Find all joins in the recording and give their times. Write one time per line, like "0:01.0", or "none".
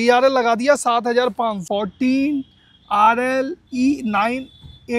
0:01.6

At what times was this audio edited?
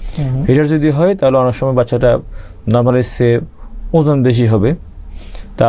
none

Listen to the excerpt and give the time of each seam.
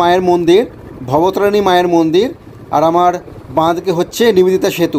none

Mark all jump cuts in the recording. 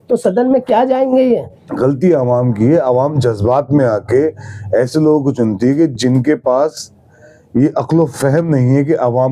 0:01.6

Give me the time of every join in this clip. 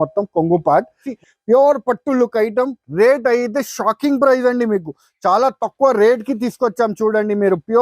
0:01.0

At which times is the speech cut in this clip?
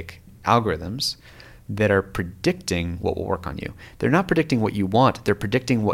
none

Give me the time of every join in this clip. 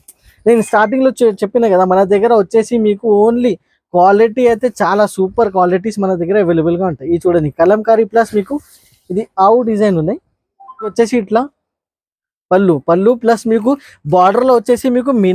0:10.9

